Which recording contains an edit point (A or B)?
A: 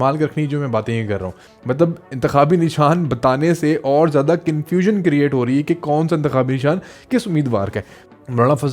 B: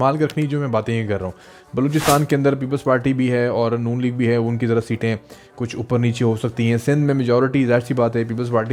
A